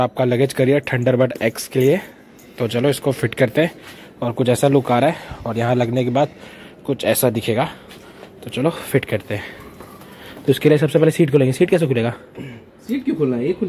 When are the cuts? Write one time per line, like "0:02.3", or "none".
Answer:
none

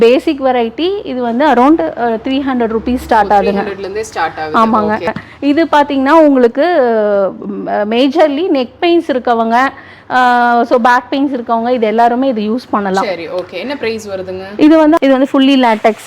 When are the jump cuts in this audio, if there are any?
0:05.2
0:15.0

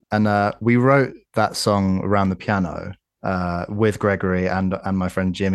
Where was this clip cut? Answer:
0:01.2

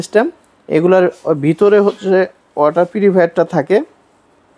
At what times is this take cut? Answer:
none

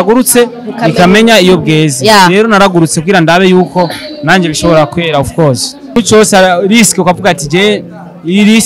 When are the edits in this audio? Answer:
0:06.0

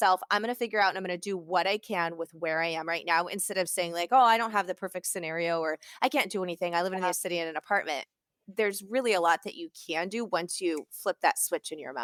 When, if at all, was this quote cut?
none

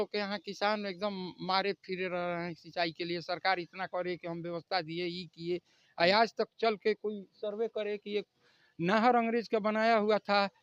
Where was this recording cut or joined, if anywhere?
none

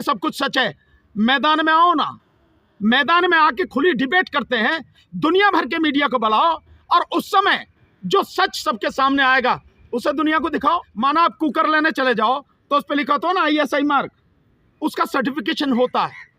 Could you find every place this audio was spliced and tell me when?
0:10.9

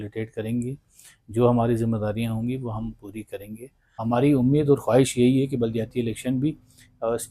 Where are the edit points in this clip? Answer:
0:04.0

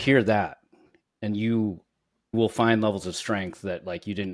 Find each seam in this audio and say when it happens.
0:02.3

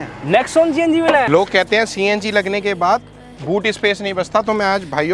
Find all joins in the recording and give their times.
0:01.3

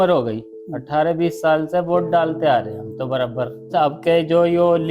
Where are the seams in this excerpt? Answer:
0:03.7

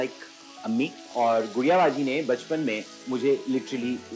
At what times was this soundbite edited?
0:01.1

